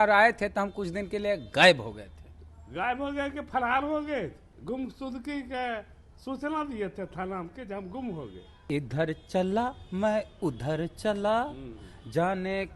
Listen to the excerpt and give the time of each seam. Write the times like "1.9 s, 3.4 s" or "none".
4.5 s, 8.5 s